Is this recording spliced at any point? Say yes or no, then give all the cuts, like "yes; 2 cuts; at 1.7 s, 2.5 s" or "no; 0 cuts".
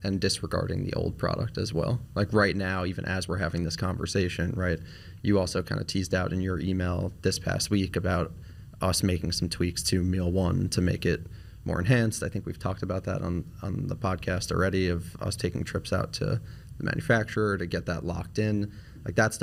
no; 0 cuts